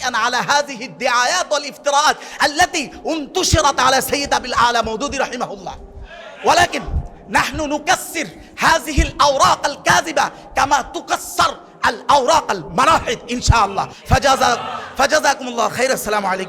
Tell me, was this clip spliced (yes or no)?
no